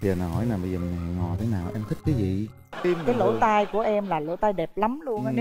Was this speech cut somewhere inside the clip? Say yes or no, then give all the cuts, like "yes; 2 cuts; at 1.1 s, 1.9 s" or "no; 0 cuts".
yes; 1 cut; at 2.7 s